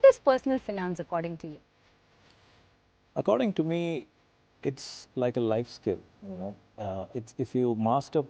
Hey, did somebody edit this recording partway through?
no; 0 cuts

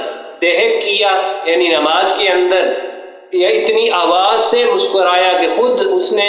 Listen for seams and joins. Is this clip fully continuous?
yes; 0 cuts

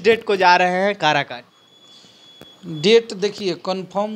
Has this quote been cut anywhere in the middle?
no; 0 cuts

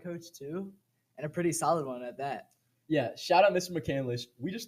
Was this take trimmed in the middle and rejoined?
no; 0 cuts

